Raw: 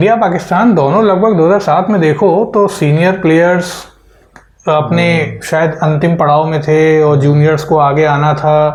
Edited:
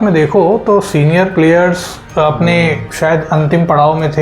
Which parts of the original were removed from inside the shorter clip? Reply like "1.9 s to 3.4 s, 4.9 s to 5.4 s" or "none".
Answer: 3.8 s to 4.4 s